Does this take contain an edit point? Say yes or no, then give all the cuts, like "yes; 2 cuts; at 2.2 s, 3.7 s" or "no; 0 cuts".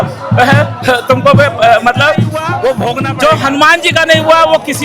yes; 1 cut; at 3.1 s